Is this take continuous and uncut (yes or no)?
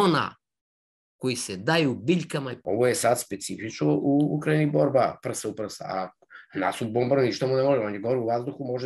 no